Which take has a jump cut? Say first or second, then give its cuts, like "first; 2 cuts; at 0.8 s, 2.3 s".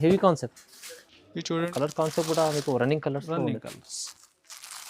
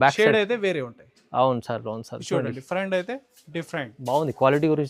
first; 1 cut; at 1.7 s